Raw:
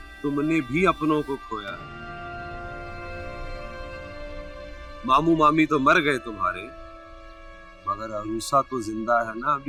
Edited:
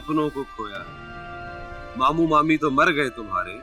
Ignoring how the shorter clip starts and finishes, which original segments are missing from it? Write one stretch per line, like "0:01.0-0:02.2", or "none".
0:02.7-0:04.9